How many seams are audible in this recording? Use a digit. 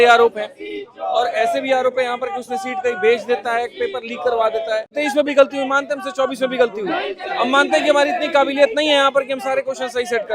1